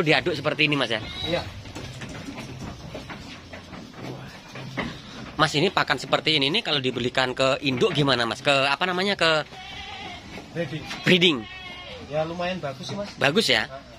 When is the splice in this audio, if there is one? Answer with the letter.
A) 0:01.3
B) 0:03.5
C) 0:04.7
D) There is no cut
D